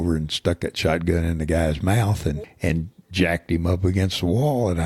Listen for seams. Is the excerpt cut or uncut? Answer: cut